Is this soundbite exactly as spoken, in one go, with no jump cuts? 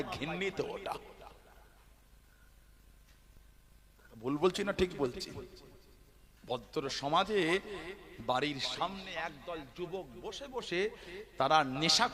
yes; 0 cuts

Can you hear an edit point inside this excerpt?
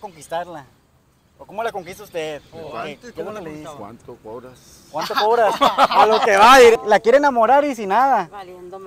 yes; 1 cut; at 6.8 s

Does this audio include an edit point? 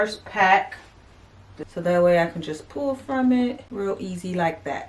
yes; 2 cuts; at 1.5 s, 3.6 s

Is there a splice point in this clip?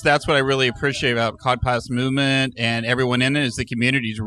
no; 0 cuts

